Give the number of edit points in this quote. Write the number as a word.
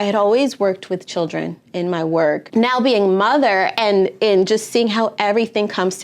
one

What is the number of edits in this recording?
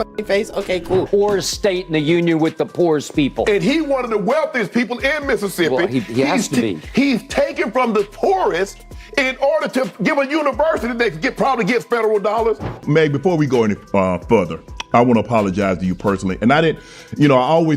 two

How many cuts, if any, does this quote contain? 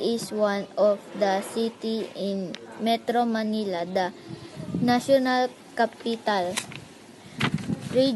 one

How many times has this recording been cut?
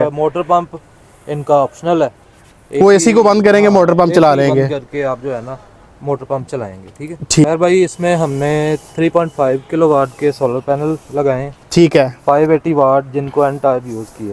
one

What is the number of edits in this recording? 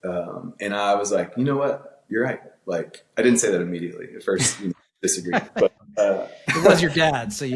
zero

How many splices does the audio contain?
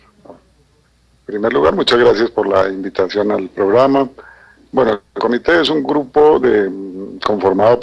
zero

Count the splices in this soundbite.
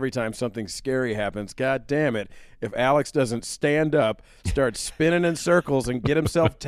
zero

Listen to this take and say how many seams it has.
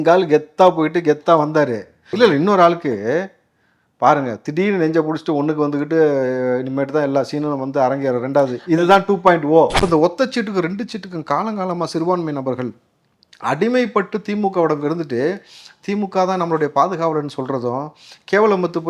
one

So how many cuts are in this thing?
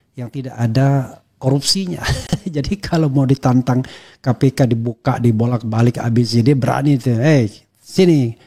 zero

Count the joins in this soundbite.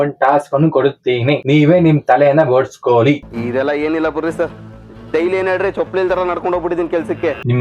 one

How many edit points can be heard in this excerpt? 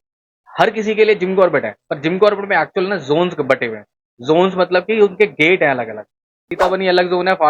one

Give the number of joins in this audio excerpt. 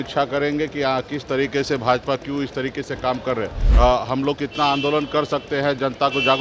one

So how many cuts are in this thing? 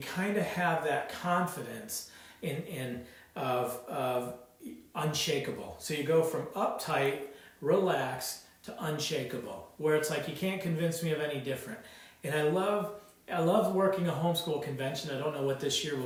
zero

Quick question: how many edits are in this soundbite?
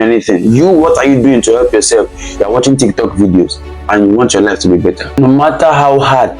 one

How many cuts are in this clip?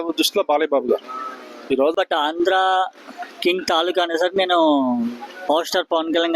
one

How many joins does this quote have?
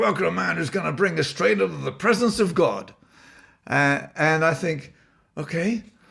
zero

